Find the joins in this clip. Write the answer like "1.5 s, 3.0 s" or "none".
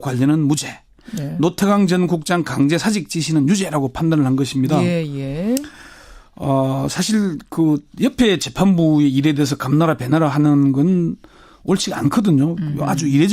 8.7 s